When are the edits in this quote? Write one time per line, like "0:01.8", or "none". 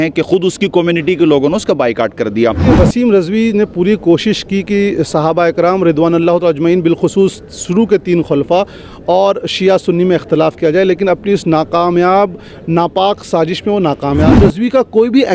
0:02.7
0:14.3